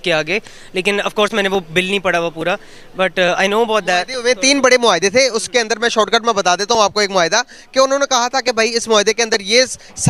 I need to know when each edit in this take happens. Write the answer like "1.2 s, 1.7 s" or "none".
none